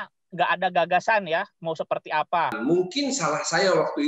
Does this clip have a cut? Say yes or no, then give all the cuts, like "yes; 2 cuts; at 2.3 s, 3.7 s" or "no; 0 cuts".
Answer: yes; 1 cut; at 2.6 s